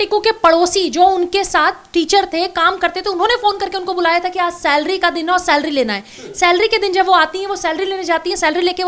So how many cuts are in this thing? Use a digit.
0